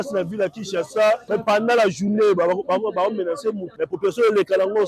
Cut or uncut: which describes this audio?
cut